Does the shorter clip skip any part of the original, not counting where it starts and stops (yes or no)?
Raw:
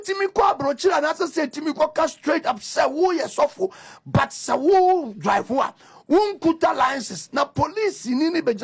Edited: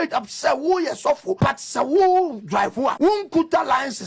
yes